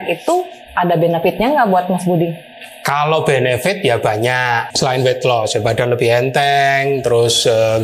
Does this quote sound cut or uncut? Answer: cut